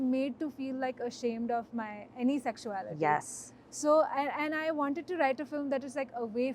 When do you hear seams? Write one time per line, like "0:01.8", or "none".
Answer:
none